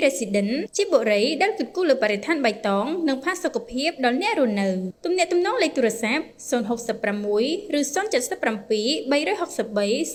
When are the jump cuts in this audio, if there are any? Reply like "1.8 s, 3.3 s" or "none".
none